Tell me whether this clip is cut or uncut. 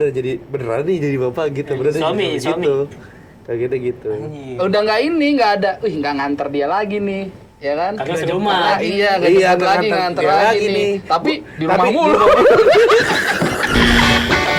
uncut